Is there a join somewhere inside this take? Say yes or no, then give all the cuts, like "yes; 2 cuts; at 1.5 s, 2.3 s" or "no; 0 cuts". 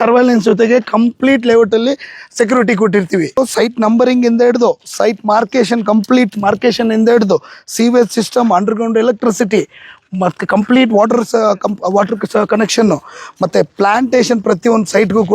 yes; 1 cut; at 3.4 s